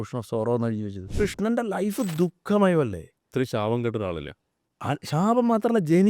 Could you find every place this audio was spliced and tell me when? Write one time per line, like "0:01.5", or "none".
0:01.1